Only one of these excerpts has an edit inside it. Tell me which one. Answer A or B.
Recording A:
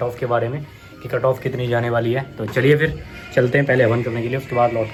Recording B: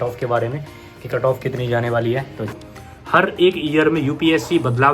B